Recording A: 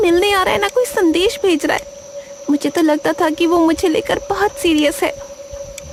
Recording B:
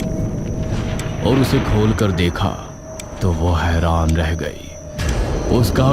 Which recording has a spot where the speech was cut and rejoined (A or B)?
B